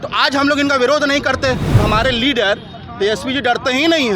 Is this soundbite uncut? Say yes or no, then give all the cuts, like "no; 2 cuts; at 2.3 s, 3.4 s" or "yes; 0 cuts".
no; 1 cut; at 1.8 s